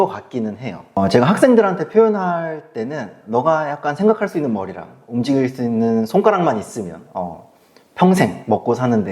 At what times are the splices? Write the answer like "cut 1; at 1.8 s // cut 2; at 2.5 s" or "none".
cut 1; at 1.0 s